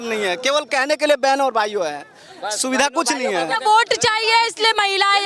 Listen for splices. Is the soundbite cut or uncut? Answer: uncut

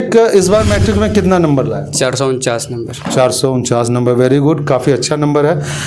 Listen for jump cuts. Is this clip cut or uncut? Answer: uncut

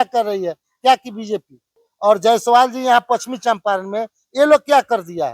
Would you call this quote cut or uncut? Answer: cut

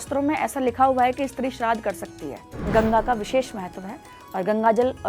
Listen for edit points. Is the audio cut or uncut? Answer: cut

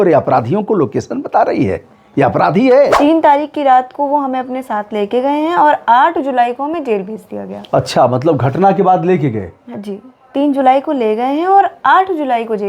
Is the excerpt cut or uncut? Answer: cut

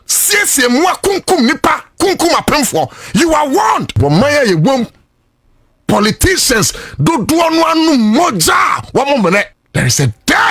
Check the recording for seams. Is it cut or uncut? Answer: cut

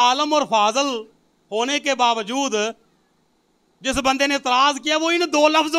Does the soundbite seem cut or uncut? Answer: uncut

